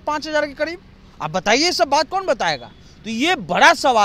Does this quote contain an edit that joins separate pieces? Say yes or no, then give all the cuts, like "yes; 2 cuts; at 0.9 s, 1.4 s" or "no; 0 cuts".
no; 0 cuts